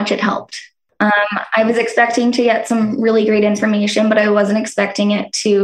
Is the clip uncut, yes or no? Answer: no